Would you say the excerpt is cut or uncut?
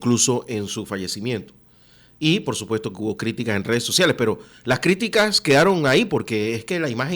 uncut